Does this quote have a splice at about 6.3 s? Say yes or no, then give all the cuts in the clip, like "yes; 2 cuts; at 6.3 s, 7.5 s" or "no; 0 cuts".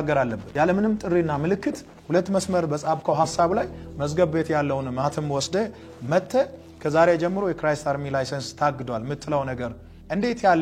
no; 0 cuts